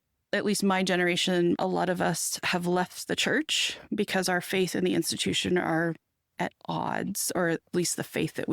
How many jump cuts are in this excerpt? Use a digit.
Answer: 1